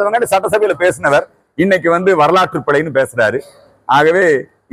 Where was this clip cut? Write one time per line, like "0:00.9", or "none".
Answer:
none